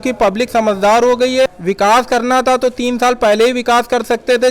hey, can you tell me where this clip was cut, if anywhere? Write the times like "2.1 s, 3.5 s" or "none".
1.5 s